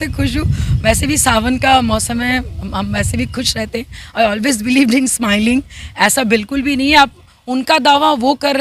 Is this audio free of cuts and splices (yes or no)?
yes